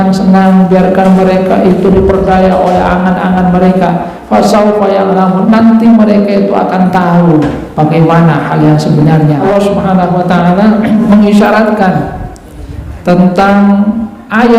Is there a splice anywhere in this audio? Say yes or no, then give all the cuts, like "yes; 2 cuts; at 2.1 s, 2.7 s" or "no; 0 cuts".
yes; 2 cuts; at 9.4 s, 11.0 s